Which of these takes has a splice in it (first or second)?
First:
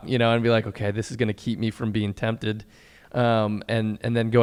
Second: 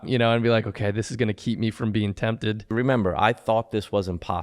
second